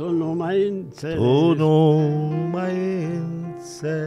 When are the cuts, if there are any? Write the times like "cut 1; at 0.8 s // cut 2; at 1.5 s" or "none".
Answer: none